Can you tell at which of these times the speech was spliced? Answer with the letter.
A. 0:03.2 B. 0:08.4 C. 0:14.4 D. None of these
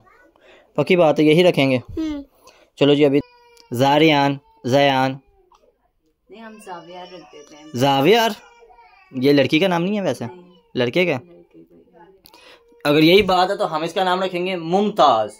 A